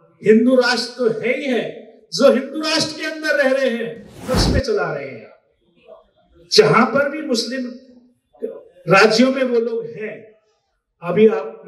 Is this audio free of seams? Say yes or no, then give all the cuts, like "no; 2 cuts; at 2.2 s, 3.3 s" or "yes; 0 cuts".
no; 1 cut; at 4.2 s